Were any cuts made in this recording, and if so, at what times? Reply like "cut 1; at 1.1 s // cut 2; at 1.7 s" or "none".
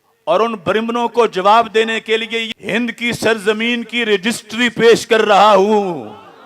cut 1; at 2.5 s